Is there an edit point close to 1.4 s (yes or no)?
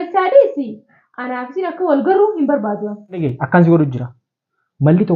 no